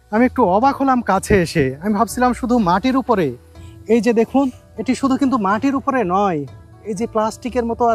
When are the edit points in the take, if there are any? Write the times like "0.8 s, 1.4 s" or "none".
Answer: none